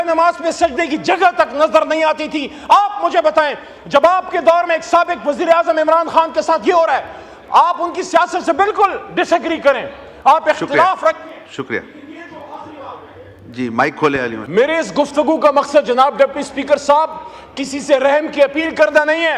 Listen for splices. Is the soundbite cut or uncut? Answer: cut